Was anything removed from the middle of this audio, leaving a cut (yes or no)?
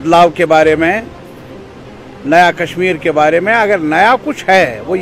no